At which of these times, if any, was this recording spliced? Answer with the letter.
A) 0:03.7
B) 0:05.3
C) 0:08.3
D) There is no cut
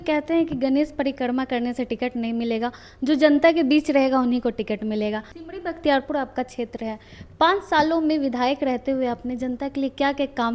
B